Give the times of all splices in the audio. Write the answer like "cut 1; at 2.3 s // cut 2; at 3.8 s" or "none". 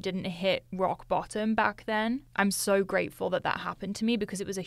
none